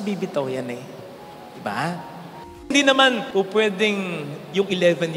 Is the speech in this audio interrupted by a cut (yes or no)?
yes